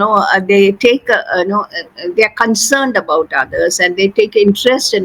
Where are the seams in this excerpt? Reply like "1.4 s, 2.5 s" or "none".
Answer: none